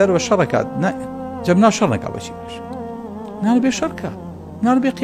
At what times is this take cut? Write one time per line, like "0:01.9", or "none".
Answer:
none